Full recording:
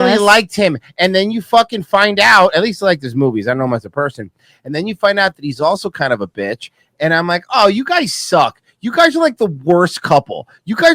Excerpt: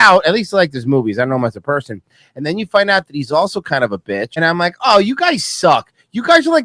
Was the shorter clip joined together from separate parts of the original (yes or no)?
yes